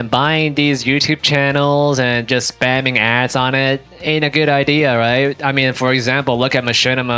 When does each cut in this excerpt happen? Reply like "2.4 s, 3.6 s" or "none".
none